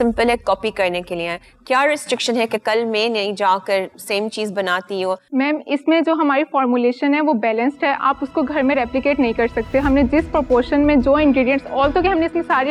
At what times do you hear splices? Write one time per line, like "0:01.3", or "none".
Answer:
none